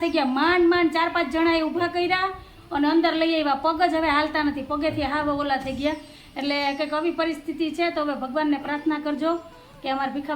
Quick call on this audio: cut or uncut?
uncut